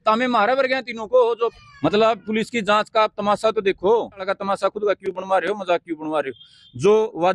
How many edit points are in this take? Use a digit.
2